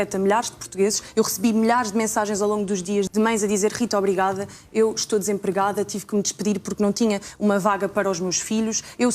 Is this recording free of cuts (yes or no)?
no